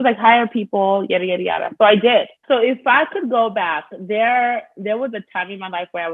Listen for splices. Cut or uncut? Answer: cut